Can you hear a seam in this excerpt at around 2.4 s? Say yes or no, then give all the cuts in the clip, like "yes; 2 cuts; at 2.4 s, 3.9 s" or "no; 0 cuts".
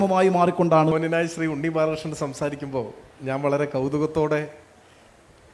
no; 1 cut; at 0.9 s